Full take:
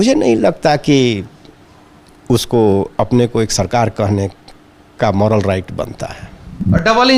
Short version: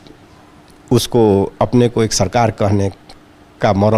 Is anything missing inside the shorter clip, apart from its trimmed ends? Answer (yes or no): no